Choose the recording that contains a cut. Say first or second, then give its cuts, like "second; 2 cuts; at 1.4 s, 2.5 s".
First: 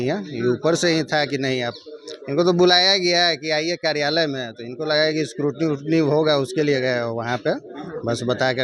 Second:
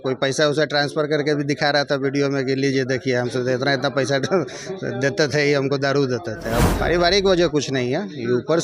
second; 1 cut; at 6.7 s